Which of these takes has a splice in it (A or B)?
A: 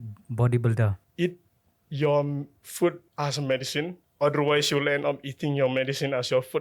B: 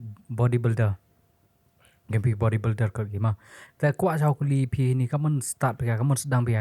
A